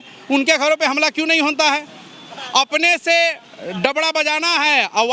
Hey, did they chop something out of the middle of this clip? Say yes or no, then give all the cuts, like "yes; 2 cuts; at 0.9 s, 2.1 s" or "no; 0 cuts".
no; 0 cuts